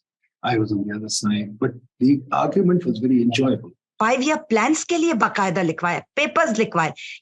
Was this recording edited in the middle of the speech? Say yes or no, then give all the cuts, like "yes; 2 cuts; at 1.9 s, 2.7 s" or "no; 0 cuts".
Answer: yes; 1 cut; at 3.8 s